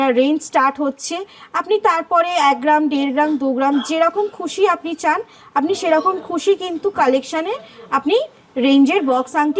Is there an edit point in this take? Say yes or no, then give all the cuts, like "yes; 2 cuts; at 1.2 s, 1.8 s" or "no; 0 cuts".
no; 0 cuts